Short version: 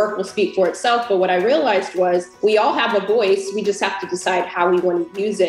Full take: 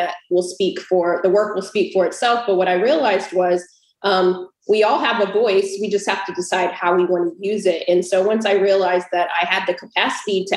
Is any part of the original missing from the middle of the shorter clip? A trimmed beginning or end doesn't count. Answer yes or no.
yes